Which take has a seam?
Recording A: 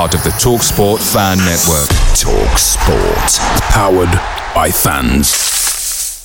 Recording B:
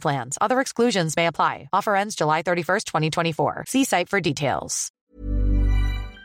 B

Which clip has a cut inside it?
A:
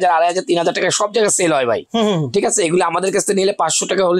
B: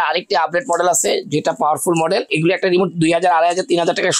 B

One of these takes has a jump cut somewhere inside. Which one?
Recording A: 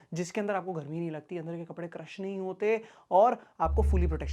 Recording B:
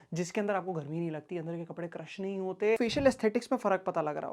B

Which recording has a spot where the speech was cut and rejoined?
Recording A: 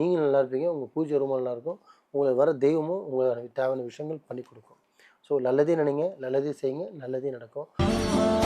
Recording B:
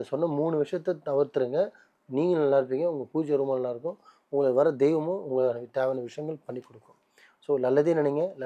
A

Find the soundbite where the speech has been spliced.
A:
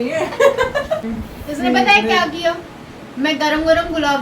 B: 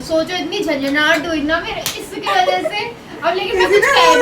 A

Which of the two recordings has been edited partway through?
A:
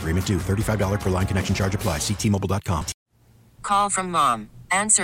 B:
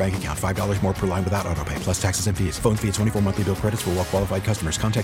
A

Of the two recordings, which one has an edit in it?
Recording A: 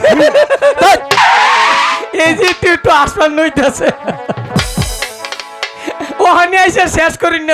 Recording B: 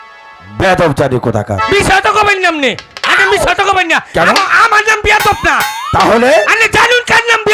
A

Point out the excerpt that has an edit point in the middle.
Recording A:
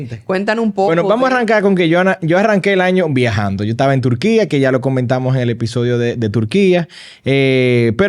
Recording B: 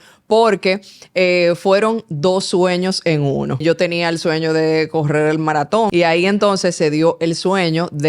B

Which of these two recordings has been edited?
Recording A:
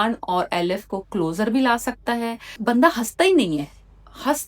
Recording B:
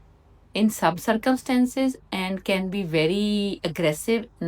A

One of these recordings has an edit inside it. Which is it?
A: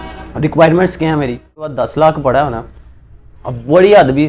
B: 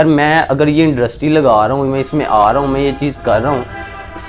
A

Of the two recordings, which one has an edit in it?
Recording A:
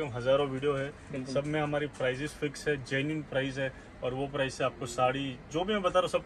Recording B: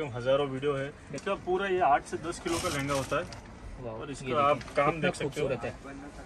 B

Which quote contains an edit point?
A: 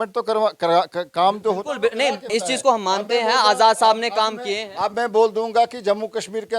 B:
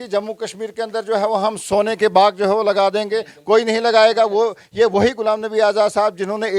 A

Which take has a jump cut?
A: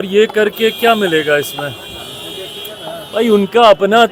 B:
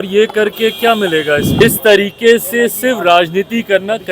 B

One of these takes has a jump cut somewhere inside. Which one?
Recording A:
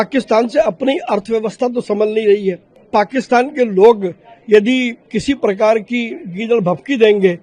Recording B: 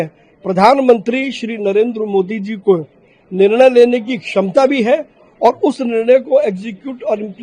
A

